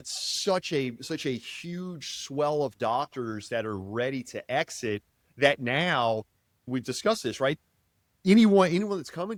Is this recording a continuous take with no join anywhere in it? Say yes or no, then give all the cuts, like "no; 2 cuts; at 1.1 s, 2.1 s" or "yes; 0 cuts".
yes; 0 cuts